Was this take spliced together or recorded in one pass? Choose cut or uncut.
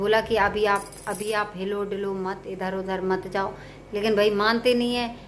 uncut